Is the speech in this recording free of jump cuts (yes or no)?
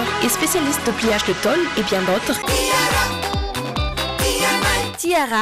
no